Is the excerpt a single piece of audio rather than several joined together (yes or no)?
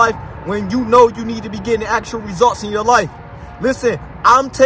yes